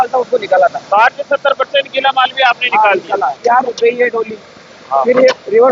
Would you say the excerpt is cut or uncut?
cut